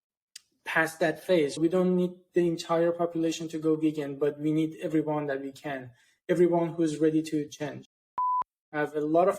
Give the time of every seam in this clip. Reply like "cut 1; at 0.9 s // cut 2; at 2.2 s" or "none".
cut 1; at 1.6 s // cut 2; at 8.1 s